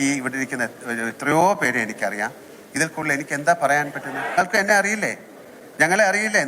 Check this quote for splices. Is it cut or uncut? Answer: cut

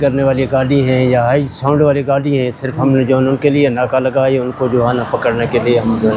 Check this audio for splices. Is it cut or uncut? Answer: uncut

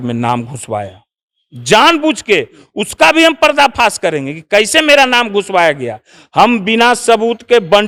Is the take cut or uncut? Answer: uncut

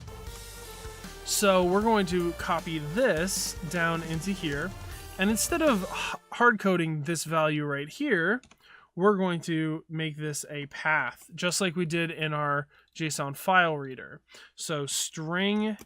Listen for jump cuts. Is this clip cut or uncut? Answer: uncut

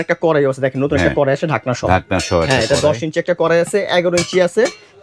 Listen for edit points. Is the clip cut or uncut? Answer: uncut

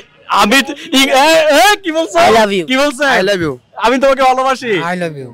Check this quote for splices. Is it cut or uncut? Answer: uncut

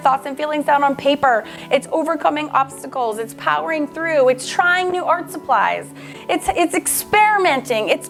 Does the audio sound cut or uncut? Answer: uncut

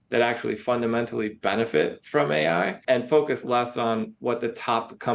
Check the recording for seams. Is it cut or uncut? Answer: cut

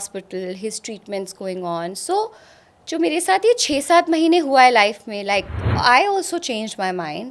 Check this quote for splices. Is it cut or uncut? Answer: cut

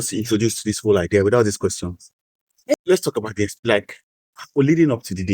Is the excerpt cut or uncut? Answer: cut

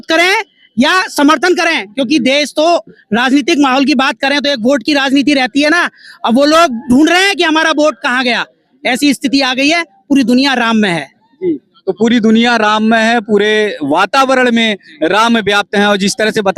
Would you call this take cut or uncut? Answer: uncut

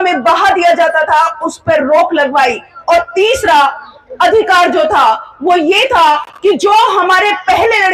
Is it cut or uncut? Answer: uncut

